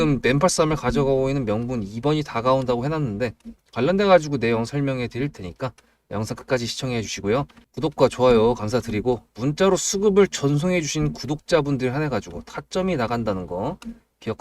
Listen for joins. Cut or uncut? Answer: cut